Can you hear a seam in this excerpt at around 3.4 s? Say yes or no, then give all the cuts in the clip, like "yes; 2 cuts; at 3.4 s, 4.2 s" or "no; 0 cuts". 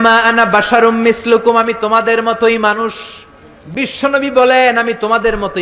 no; 0 cuts